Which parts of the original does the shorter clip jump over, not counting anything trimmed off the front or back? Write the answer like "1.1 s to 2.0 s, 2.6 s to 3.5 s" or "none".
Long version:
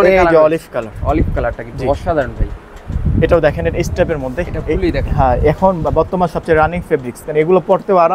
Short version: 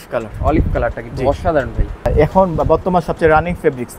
2.7 s to 5.3 s